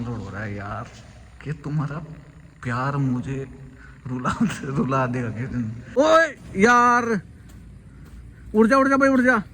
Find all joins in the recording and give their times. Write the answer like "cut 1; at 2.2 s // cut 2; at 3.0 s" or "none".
cut 1; at 5.9 s

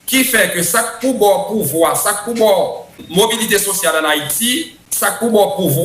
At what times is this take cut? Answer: cut 1; at 2.9 s // cut 2; at 4.8 s

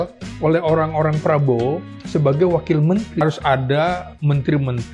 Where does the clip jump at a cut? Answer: cut 1; at 3.2 s

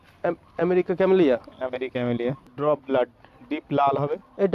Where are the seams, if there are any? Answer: cut 1; at 2.5 s

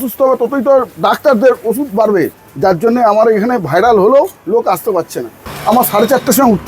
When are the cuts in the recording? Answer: cut 1; at 2.4 s // cut 2; at 5.5 s

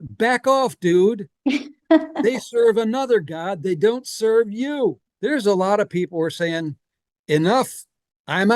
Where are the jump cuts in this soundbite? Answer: cut 1; at 5.1 s

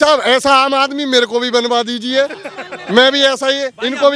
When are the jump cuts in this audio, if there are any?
none

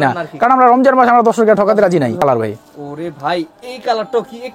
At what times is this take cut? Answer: cut 1; at 2.2 s

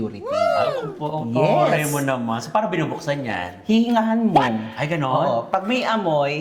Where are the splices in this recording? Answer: none

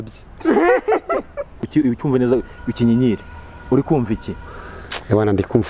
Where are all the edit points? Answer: cut 1; at 1.7 s

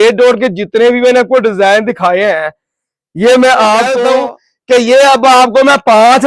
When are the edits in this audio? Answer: cut 1; at 4.0 s

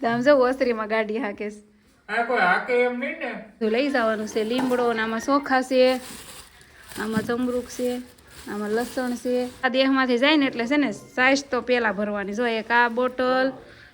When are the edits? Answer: cut 1; at 3.6 s // cut 2; at 9.6 s

